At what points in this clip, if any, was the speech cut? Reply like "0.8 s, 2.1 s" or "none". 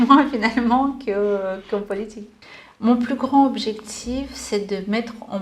2.3 s